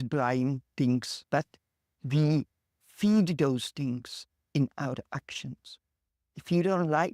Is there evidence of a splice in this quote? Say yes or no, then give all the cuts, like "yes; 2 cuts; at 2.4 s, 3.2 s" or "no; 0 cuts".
yes; 1 cut; at 1.1 s